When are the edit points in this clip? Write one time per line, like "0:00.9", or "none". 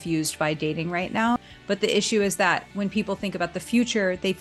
0:01.4